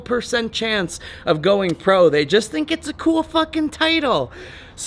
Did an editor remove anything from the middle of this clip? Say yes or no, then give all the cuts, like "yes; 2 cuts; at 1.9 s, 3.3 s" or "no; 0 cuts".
no; 0 cuts